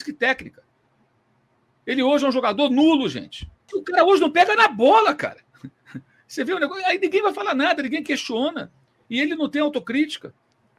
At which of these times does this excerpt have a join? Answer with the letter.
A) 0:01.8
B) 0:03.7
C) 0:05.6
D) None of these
B